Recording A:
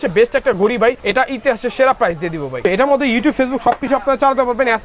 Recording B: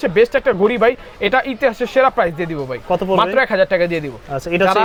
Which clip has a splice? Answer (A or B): A